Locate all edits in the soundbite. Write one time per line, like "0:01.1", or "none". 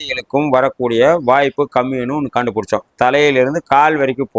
none